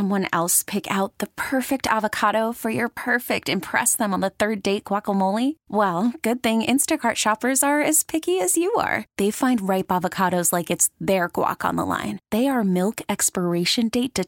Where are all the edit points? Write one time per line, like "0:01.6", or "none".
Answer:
none